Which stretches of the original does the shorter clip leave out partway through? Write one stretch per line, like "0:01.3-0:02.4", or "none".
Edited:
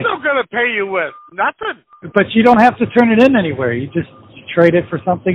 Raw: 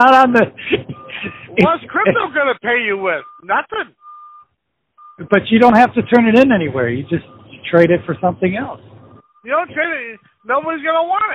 0:04.0-0:05.1

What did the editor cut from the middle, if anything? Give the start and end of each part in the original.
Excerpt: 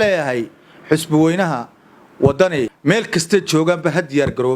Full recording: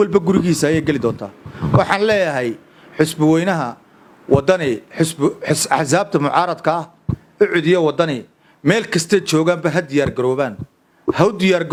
0:04.8-0:08.5

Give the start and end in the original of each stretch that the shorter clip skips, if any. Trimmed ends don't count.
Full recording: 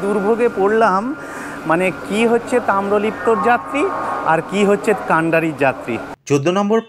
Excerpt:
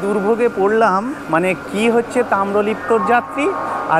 0:01.2-0:01.5

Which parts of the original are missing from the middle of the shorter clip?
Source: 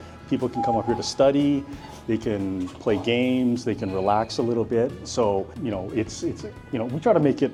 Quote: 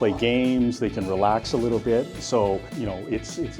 none

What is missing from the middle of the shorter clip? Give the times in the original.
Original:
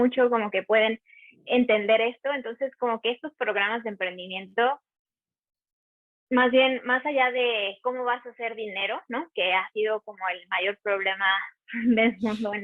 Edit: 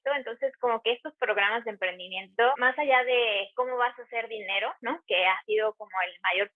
0:04.8-0:06.9

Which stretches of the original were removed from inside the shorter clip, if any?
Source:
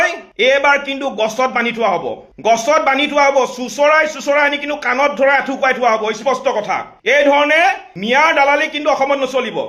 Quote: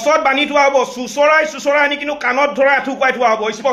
none

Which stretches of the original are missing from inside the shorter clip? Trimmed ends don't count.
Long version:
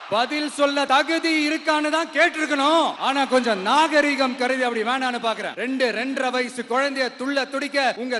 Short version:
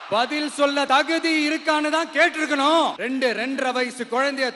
0:03.0-0:05.5

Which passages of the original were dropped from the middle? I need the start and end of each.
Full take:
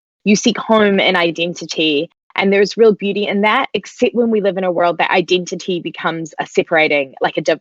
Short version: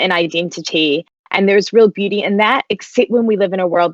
none

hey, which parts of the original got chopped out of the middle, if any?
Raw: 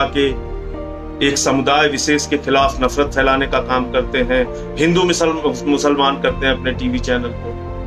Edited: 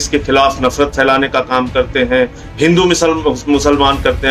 none

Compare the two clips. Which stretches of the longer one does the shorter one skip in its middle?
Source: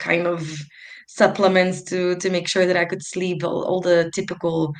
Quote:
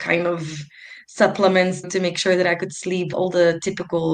0:01.9-0:02.2
0:03.4-0:03.6

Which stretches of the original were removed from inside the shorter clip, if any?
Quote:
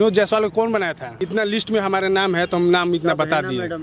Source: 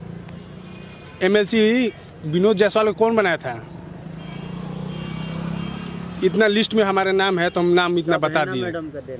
0:03.5-0:06.1

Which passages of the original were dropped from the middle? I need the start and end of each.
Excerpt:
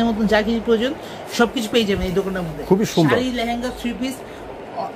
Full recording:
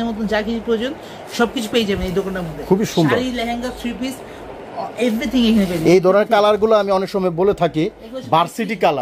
none

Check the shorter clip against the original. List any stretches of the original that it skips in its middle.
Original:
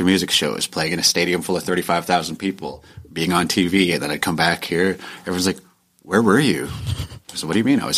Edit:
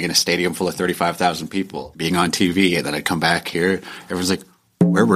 0:02.7-0:03.0

